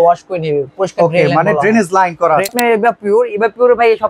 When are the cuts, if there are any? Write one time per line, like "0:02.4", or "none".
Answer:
0:02.5